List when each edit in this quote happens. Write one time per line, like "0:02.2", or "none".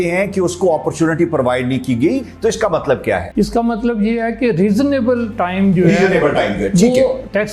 0:02.2
0:03.3